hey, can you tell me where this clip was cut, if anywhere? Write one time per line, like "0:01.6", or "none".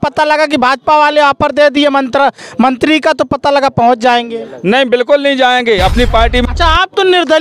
0:06.4